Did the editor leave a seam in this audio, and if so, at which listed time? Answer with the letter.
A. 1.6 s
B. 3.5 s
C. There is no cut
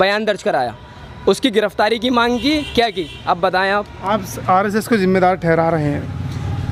C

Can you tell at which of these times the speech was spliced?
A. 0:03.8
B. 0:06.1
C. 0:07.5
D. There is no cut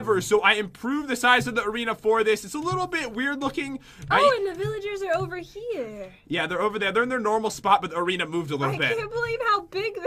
B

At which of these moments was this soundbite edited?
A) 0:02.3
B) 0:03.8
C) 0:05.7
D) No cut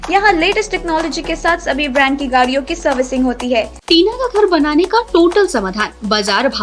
B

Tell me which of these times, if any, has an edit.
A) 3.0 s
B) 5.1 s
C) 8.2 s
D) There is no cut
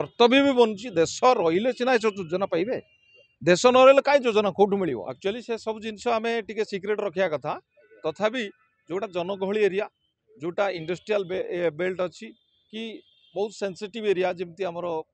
B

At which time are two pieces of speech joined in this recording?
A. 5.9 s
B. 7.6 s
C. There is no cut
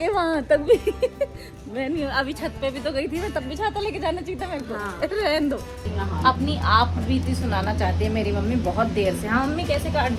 A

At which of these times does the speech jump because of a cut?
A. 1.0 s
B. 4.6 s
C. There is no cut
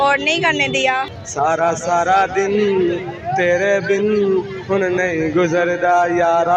A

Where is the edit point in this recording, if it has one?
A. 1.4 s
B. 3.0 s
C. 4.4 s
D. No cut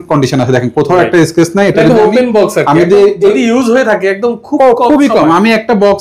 D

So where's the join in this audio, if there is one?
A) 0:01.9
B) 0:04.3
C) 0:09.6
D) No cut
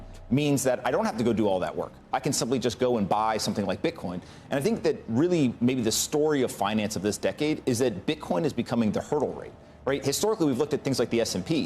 B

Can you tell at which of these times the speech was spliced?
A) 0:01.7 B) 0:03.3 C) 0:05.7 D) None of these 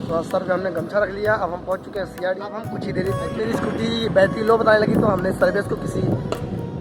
B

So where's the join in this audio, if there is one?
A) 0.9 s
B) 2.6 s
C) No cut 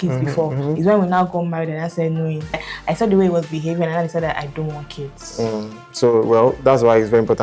B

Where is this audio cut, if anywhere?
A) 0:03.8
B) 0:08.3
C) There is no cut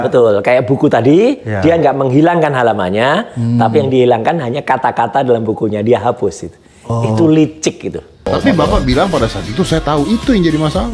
B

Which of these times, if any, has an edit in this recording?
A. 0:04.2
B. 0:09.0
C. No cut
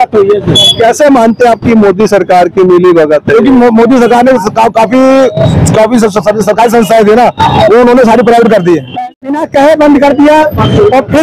B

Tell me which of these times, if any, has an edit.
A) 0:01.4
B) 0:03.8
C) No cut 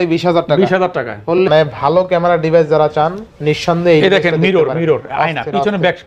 A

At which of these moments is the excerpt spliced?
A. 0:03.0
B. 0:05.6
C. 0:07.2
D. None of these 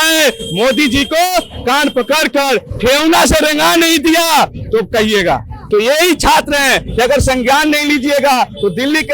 B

